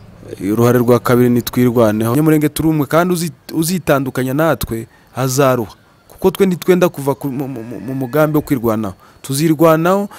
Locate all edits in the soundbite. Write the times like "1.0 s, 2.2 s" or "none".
2.1 s